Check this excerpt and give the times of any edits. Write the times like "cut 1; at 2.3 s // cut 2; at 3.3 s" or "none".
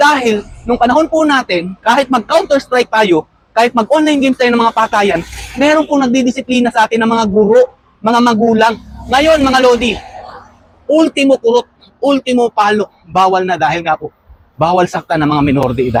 none